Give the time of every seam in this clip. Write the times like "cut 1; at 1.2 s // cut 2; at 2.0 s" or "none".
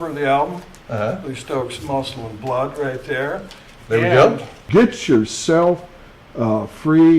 cut 1; at 4.5 s

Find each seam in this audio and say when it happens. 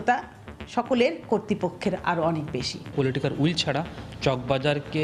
cut 1; at 2.9 s

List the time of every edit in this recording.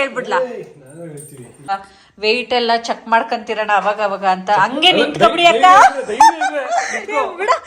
cut 1; at 1.7 s

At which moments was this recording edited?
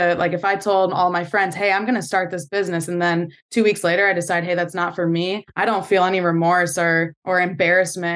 cut 1; at 5.5 s // cut 2; at 7.2 s

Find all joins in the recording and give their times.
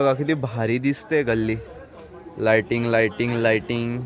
none

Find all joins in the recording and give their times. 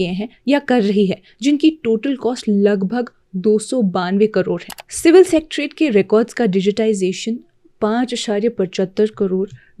none

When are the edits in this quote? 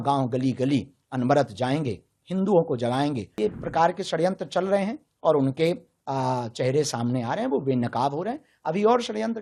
cut 1; at 3.3 s

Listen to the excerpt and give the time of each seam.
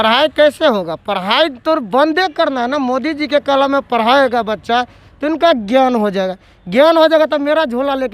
none

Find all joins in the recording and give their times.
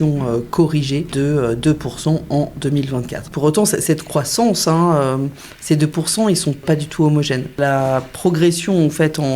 cut 1; at 1.1 s // cut 2; at 3.3 s // cut 3; at 6.6 s // cut 4; at 7.6 s

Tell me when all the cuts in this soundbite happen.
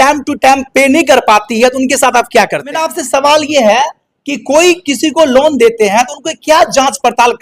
cut 1; at 3.0 s

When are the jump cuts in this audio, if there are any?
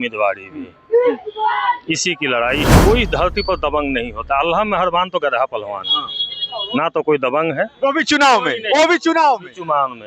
cut 1; at 2.7 s

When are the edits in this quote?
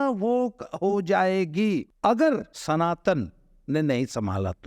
cut 1; at 1.9 s // cut 2; at 2.5 s

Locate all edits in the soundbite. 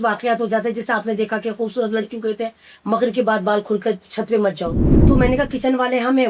cut 1; at 4.9 s

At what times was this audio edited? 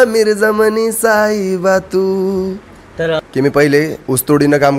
cut 1; at 3.2 s

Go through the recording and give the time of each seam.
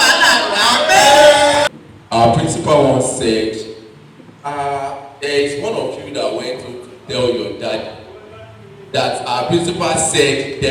cut 1; at 1.6 s

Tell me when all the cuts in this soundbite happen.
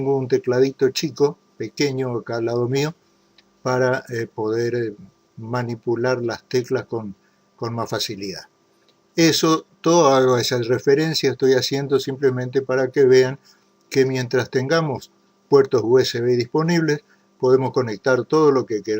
cut 1; at 7.6 s

